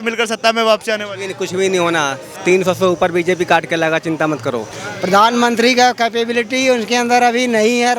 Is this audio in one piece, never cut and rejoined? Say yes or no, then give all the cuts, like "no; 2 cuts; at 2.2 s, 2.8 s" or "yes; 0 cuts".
no; 1 cut; at 4.8 s